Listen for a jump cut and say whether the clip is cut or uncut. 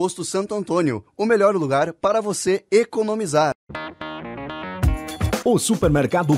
cut